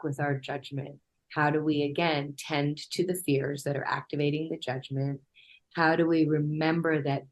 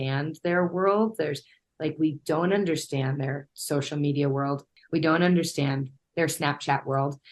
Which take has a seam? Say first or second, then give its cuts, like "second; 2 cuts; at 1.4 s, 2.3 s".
second; 2 cuts; at 4.7 s, 6.0 s